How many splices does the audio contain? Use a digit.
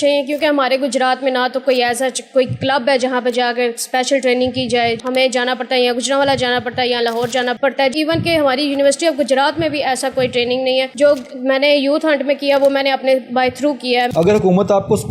4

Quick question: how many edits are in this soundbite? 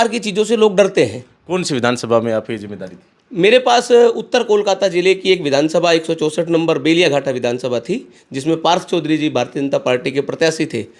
0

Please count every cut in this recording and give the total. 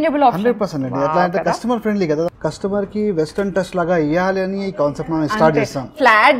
1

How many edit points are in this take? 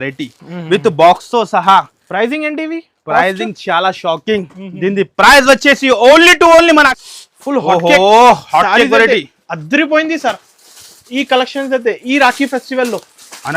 1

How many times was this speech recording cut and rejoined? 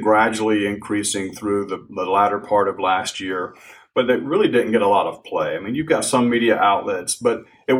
0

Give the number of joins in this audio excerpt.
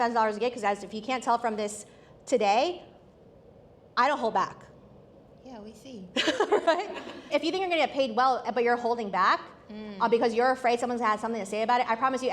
1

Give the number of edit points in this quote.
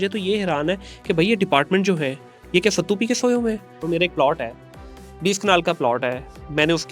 1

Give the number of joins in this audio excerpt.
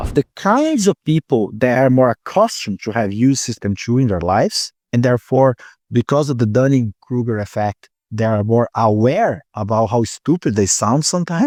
0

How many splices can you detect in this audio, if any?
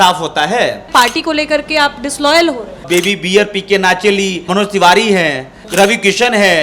2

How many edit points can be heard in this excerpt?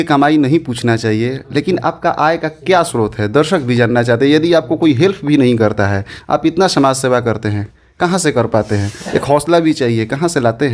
0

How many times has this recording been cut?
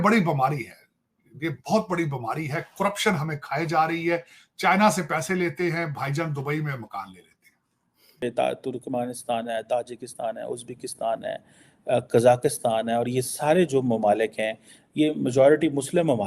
1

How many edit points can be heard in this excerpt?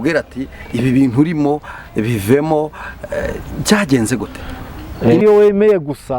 1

